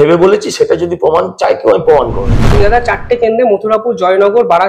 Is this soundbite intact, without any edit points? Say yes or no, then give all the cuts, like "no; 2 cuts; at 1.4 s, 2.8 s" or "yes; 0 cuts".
no; 1 cut; at 2.6 s